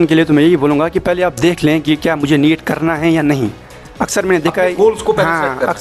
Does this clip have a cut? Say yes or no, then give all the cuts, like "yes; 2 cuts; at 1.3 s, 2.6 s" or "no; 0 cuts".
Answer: no; 0 cuts